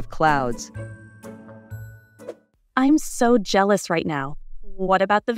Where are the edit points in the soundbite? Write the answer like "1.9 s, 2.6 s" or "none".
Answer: 2.6 s